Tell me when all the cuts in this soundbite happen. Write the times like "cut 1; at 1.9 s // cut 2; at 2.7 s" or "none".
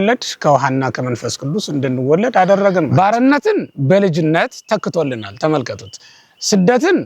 cut 1; at 2.9 s